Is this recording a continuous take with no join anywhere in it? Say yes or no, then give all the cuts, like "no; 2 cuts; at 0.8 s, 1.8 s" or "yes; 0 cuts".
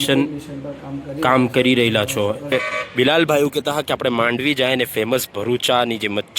no; 1 cut; at 2.5 s